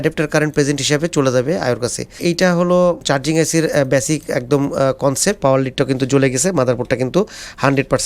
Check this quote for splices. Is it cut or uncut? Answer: cut